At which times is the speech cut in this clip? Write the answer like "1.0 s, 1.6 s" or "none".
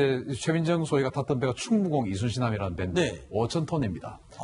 1.7 s